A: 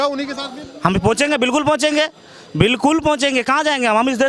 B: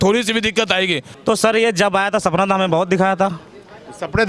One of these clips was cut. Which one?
B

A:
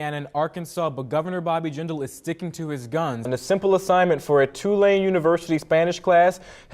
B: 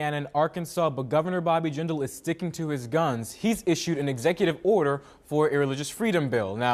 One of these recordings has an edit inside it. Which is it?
A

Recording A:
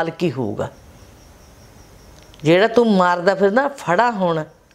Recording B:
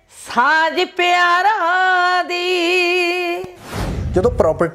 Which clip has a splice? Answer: B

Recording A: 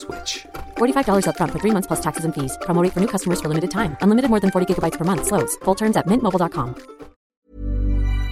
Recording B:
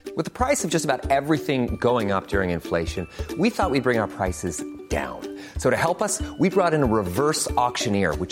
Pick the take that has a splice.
A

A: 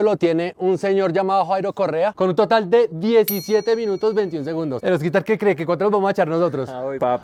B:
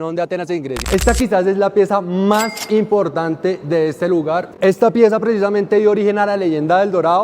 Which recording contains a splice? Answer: B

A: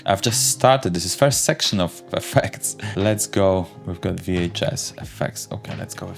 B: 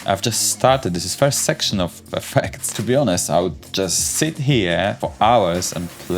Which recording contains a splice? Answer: B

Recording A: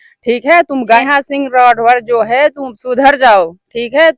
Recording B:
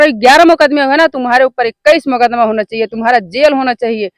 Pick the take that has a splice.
A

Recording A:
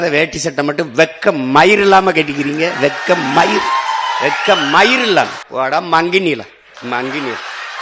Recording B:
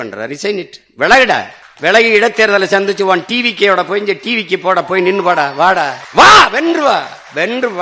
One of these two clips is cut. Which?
A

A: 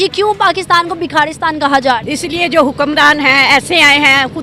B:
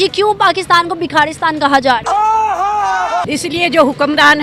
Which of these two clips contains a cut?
A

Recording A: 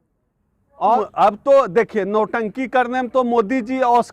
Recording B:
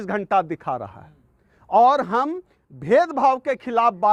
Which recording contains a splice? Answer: A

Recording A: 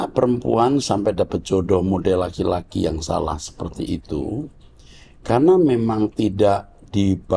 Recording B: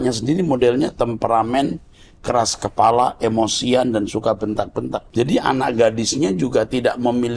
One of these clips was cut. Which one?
B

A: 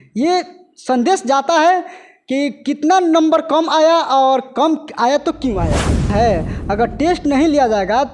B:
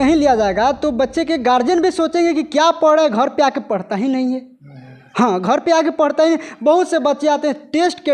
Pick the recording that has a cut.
A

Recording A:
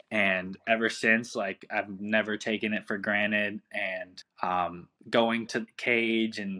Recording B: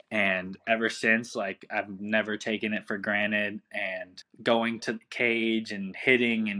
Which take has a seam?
B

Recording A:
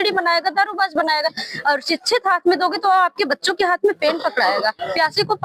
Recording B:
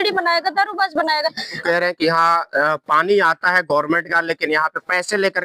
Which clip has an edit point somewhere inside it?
B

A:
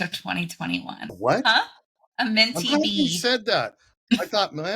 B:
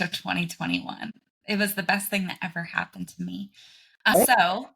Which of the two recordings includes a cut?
A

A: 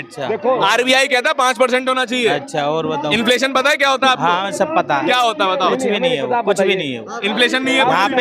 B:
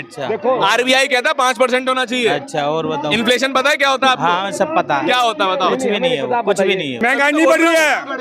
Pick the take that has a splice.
B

